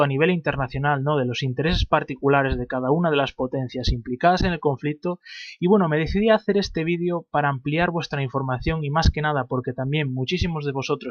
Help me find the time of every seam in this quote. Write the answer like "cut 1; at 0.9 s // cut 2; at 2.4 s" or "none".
cut 1; at 6.8 s